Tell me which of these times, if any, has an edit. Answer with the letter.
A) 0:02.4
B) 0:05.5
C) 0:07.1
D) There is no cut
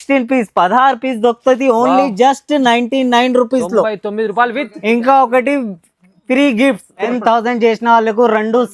C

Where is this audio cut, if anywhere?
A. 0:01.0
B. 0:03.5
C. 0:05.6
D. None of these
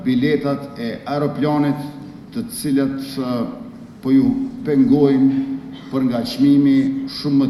D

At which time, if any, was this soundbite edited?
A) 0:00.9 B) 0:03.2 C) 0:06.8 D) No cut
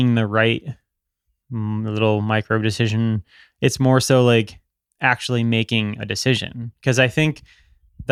D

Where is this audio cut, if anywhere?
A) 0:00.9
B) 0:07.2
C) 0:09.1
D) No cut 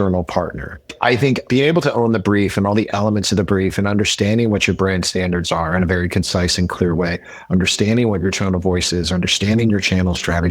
A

